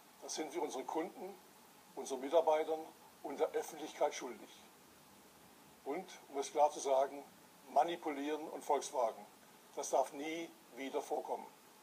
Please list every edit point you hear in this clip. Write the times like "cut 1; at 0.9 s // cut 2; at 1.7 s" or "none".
cut 1; at 9.3 s